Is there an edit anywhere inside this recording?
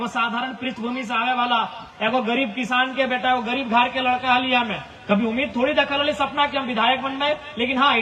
no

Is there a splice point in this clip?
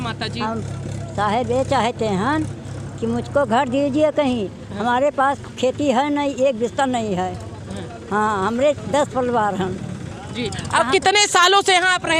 no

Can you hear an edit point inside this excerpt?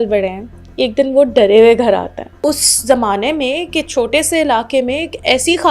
yes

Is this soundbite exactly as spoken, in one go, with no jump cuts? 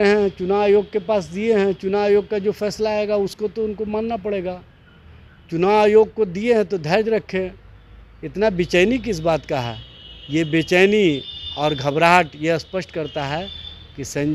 yes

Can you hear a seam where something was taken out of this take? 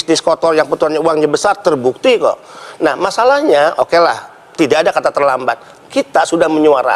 no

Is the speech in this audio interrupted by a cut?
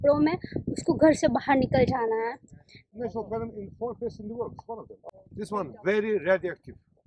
yes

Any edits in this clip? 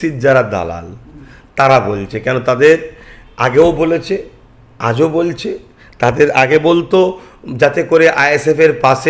no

